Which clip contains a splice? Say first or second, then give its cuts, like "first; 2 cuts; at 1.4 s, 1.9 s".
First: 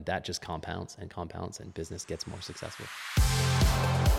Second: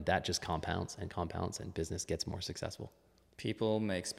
first; 1 cut; at 2.9 s